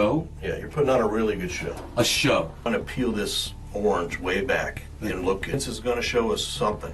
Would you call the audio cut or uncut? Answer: cut